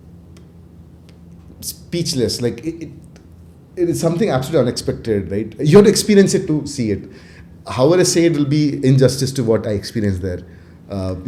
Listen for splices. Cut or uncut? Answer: uncut